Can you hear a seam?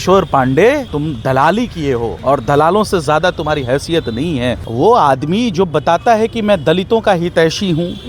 yes; 3 cuts; at 0.9 s, 2.1 s, 4.6 s

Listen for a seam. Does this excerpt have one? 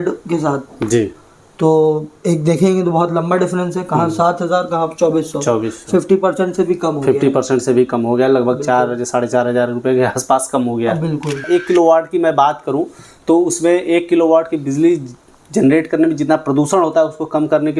yes; 1 cut; at 11.5 s

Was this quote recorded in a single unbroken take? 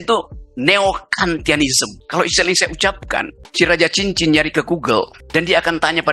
no; 3 cuts; at 2.0 s, 3.4 s, 5.2 s

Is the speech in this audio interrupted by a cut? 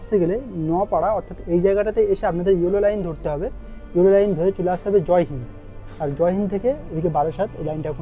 no; 0 cuts

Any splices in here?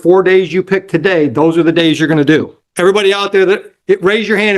yes; 1 cut; at 2.6 s

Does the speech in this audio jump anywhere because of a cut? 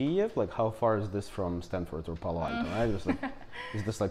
no; 0 cuts

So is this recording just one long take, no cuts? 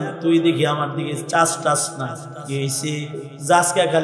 no; 1 cut; at 2.3 s

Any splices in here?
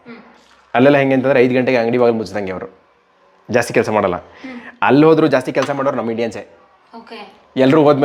no; 0 cuts

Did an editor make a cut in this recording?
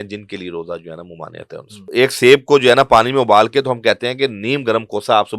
yes; 1 cut; at 1.9 s

